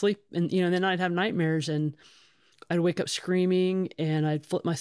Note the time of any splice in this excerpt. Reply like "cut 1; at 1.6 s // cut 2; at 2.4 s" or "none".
none